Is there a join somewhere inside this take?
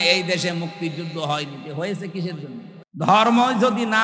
yes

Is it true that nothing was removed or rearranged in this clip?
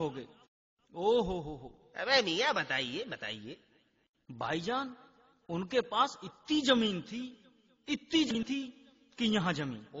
no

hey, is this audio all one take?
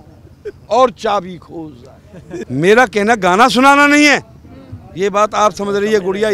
no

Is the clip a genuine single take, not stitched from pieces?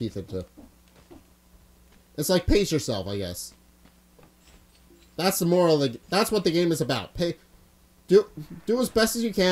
yes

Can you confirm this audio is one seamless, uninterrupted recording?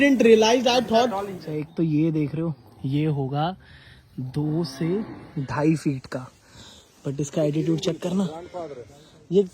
no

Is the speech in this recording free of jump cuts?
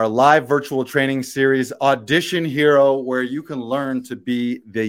yes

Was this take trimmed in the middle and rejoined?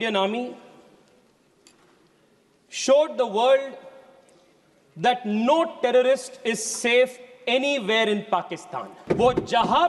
yes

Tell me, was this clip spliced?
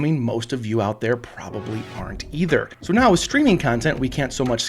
yes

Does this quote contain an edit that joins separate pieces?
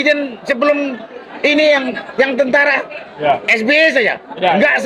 no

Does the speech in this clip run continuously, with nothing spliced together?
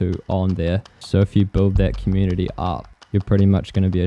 no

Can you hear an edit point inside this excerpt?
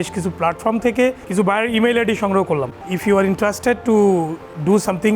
yes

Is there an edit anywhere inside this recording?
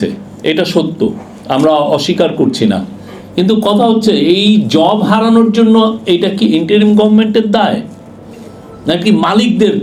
no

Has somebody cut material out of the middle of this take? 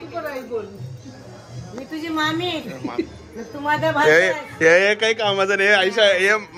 no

